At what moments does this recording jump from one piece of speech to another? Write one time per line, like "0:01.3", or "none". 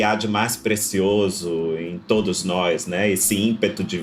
none